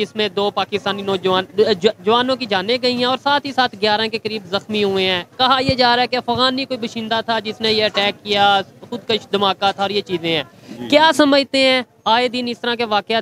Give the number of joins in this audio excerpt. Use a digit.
0